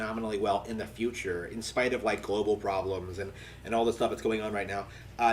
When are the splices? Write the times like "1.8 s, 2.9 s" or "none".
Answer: 1.5 s